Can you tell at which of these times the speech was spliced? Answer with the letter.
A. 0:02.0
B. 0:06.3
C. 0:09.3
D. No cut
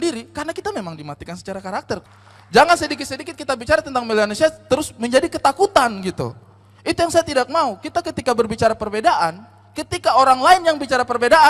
A